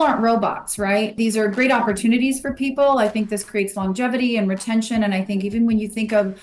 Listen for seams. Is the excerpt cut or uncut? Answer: cut